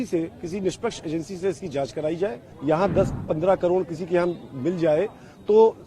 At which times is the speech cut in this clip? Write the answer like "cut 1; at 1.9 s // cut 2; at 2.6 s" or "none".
cut 1; at 2.5 s